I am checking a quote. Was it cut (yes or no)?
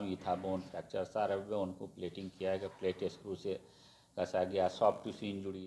no